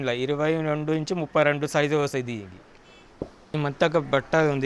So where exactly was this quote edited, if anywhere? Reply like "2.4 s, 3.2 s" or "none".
3.4 s

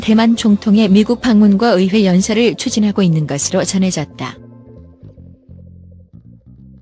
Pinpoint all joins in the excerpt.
none

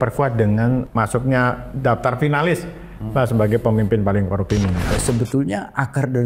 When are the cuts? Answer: 0.9 s, 5.0 s

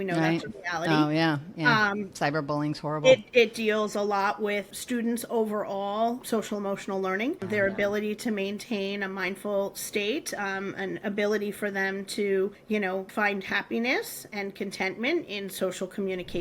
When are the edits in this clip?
4.7 s, 6.2 s, 7.4 s, 12.9 s

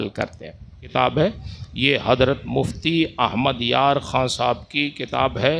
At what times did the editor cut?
0.9 s

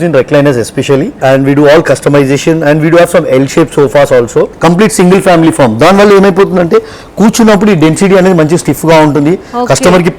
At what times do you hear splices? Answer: 1.1 s, 4.5 s

